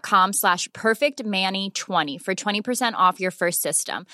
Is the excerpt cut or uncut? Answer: uncut